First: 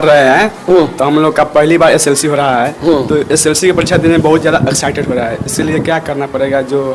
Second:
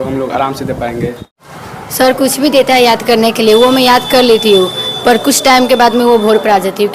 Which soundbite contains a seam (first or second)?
second